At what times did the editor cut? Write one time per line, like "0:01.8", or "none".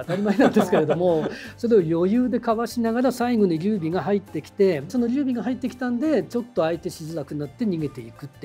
none